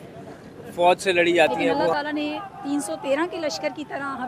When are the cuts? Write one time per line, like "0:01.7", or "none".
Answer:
0:01.9